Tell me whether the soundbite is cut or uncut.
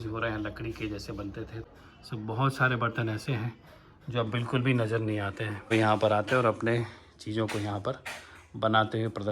cut